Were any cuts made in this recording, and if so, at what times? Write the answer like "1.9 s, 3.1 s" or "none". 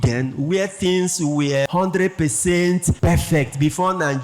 1.7 s, 2.9 s